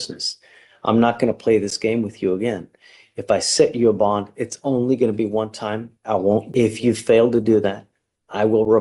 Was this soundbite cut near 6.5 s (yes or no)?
yes